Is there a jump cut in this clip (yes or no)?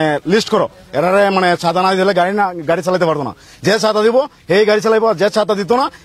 no